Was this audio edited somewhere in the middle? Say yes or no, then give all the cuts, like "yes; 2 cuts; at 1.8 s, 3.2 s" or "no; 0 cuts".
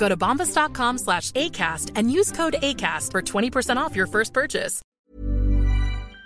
yes; 1 cut; at 4.8 s